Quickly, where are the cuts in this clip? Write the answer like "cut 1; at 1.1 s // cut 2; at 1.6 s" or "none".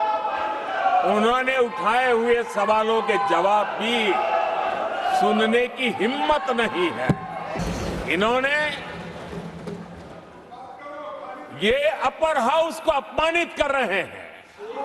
cut 1; at 7.6 s